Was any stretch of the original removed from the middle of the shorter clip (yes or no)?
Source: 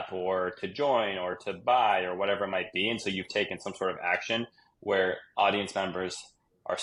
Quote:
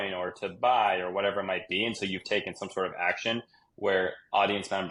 no